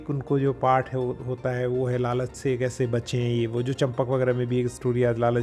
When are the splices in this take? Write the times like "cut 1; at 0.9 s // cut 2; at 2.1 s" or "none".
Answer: none